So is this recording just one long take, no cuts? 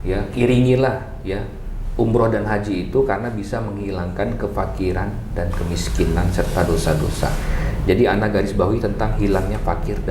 yes; 0 cuts

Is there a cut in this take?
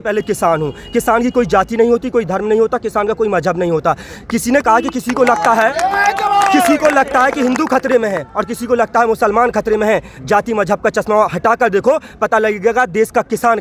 no; 0 cuts

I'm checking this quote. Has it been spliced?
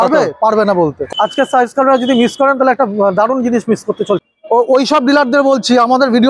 yes; 2 cuts; at 1.0 s, 4.2 s

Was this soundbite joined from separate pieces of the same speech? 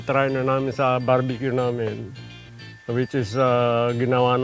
no; 0 cuts

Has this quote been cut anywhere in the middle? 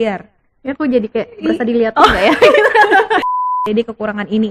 yes; 1 cut; at 3.5 s

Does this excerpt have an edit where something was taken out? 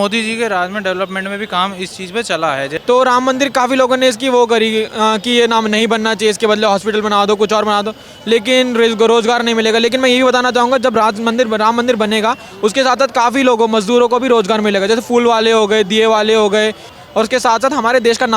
yes; 2 cuts; at 2.7 s, 17.0 s

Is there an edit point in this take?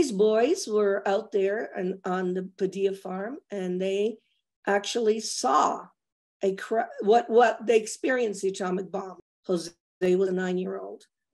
yes; 1 cut; at 9.1 s

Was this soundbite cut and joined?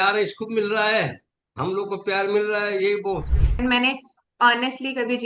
yes; 1 cut; at 3.6 s

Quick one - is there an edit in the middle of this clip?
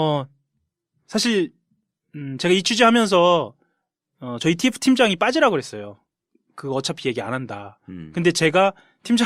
yes; 1 cut; at 4.4 s

